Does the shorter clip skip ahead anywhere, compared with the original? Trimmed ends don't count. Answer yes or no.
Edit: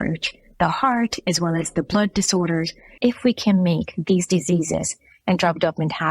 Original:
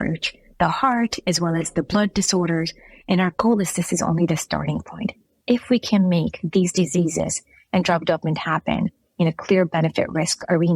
yes